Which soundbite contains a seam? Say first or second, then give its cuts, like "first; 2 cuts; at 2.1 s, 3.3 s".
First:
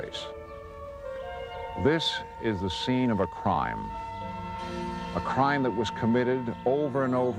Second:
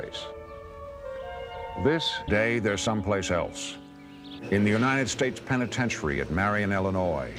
first; 1 cut; at 2.2 s